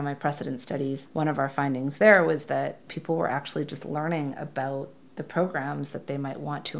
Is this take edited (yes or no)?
yes